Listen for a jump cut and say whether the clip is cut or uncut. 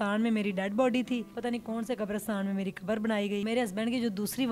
cut